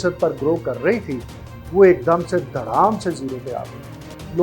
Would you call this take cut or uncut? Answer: uncut